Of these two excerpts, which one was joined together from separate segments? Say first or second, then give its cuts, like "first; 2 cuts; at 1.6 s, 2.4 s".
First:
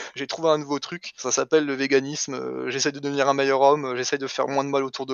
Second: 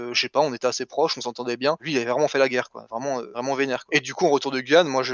second; 2 cuts; at 1.8 s, 3.8 s